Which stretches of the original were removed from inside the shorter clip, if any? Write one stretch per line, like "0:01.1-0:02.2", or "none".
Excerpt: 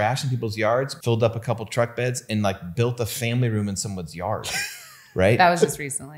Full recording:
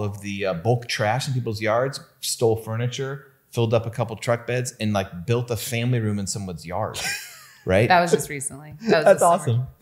0:02.0-0:03.5